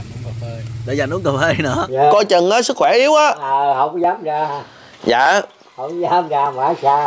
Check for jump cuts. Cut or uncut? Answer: cut